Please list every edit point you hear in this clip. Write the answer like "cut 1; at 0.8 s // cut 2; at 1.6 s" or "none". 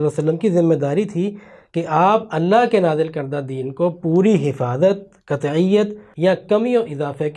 cut 1; at 6.0 s

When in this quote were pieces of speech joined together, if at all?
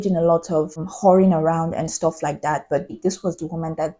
cut 1; at 2.9 s

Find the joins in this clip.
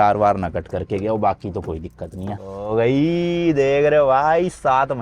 cut 1; at 2.3 s

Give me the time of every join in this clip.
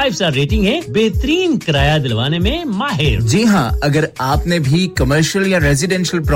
none

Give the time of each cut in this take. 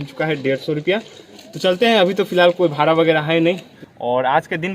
cut 1; at 3.7 s

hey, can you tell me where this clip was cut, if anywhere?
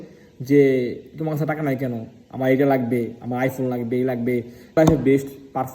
cut 1; at 4.8 s

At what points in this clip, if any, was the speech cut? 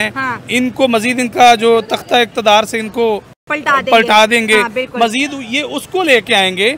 none

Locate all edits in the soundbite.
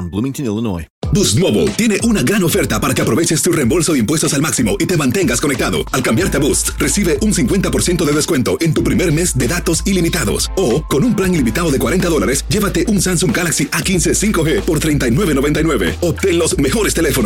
cut 1; at 0.9 s

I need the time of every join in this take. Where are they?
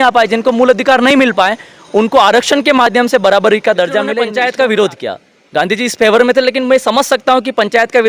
cut 1; at 4.3 s

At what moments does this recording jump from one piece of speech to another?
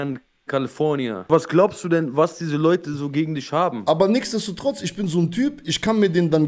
cut 1; at 1.3 s // cut 2; at 3.8 s

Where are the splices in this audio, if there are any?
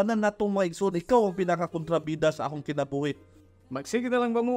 cut 1; at 3.3 s

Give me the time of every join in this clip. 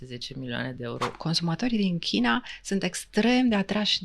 cut 1; at 1.2 s

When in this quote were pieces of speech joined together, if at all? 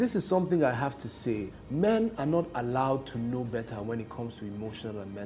cut 1; at 1.6 s

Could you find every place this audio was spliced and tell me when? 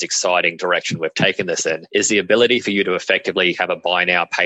cut 1; at 1.8 s

